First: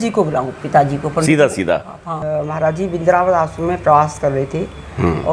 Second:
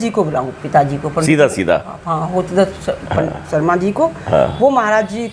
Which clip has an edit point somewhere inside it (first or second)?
first